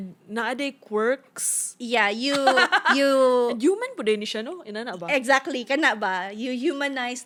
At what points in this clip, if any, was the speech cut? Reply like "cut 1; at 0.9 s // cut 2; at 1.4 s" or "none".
none